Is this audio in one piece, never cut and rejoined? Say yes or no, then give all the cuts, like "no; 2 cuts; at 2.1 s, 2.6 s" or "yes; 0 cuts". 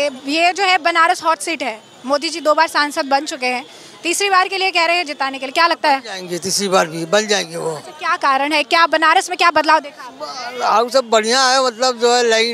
yes; 0 cuts